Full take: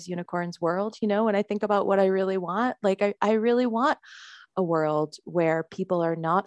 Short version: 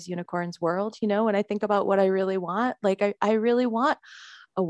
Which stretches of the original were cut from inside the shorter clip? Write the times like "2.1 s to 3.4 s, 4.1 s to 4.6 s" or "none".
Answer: none